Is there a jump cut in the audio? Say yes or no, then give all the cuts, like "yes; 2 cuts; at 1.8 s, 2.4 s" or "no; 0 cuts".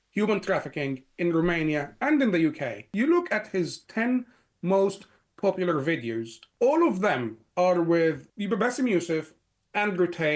yes; 3 cuts; at 2.8 s, 6.4 s, 8.3 s